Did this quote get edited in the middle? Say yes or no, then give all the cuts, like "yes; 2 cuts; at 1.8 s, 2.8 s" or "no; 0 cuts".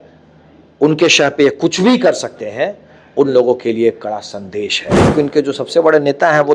yes; 1 cut; at 5.1 s